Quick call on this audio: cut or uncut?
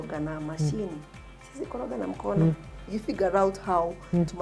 cut